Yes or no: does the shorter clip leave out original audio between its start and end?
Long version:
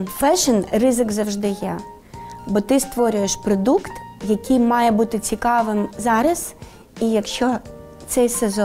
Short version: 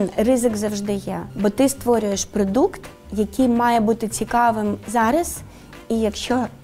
yes